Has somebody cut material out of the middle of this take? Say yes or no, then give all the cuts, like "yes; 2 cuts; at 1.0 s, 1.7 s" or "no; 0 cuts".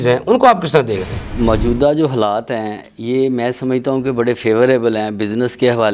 yes; 1 cut; at 1.4 s